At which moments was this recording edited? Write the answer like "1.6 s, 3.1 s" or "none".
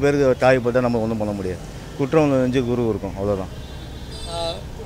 none